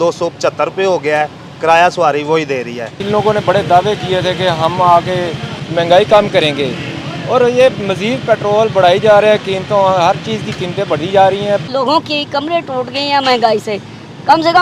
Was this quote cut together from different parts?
yes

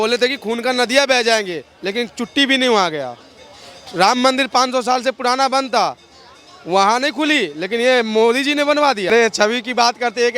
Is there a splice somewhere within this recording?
yes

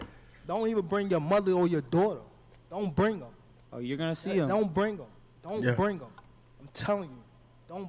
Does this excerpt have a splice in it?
no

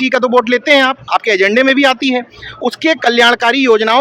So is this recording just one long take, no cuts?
yes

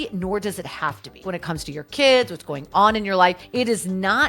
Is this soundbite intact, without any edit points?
no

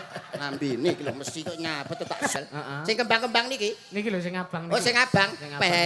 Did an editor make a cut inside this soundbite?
yes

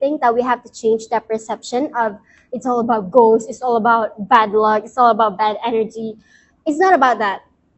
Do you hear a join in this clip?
no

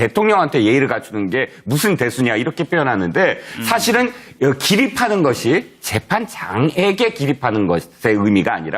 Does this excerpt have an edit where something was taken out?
yes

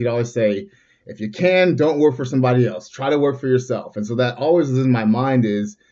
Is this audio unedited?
yes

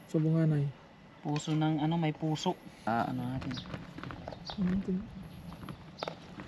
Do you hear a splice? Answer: yes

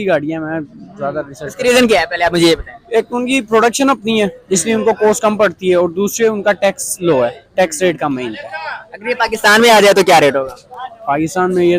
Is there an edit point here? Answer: no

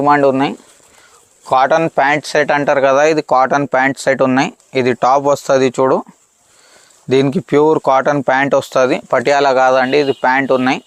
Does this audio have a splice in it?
no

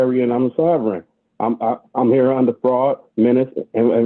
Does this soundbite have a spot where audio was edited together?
no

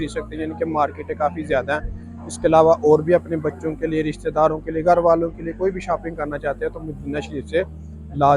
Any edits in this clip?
no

